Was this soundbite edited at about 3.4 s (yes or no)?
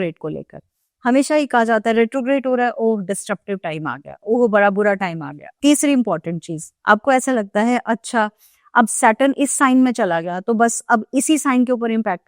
no